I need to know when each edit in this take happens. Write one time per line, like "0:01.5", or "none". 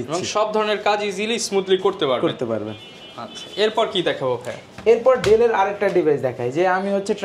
none

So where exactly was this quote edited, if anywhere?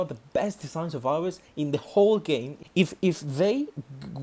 0:02.6

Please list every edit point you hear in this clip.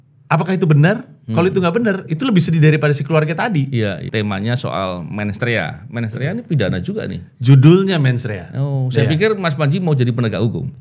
0:04.0

